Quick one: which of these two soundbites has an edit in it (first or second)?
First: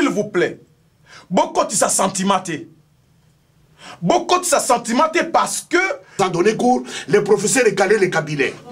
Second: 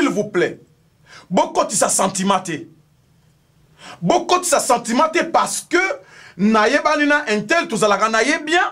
first